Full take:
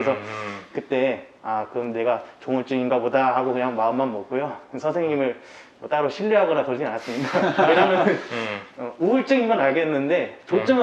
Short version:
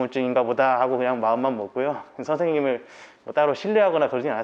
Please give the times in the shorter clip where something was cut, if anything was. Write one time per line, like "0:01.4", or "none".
none